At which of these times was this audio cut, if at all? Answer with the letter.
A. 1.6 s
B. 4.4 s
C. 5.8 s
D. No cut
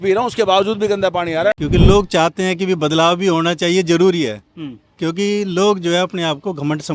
A